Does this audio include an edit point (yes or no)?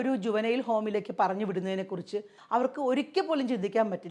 yes